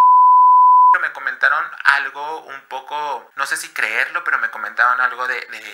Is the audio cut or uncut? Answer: cut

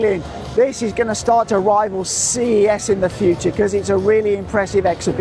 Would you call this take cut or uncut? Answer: uncut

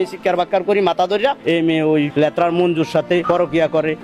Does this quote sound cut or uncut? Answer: cut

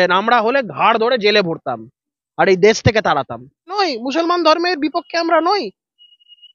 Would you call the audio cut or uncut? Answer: cut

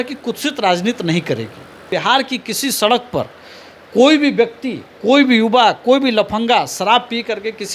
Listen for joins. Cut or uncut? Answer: cut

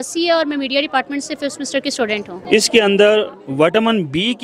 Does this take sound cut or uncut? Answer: cut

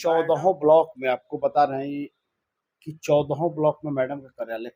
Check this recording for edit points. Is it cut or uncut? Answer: uncut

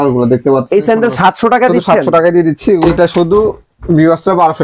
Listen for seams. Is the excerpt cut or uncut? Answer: cut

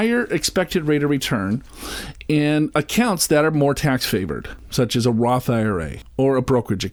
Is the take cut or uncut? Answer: uncut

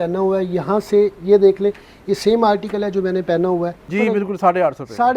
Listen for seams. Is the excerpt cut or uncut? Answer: cut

